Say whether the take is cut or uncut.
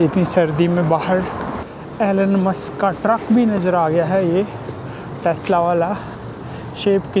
cut